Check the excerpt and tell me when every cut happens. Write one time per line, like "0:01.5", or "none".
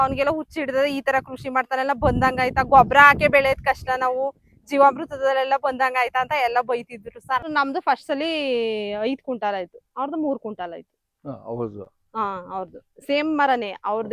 0:07.5